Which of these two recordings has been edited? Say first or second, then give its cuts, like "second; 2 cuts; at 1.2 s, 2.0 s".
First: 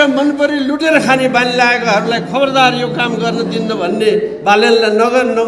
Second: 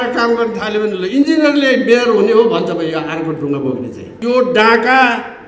second; 1 cut; at 4.2 s